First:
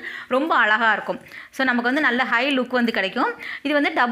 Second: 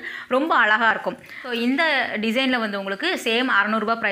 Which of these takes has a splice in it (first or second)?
second